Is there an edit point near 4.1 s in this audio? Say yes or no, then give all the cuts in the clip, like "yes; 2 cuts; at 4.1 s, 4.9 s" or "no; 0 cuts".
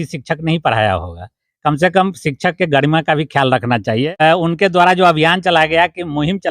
yes; 1 cut; at 4.1 s